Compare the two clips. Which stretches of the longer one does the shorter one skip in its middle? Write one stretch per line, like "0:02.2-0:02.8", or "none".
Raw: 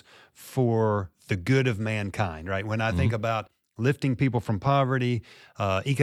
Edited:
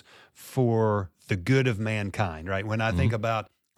none